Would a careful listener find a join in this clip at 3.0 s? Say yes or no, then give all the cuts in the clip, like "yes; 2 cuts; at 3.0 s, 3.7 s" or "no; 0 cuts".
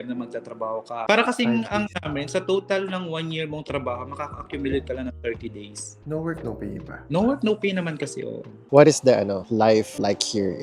no; 3 cuts; at 0.9 s, 5.9 s, 8.6 s